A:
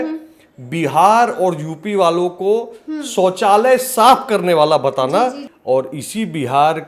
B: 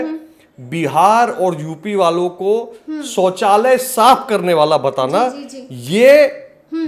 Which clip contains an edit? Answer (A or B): A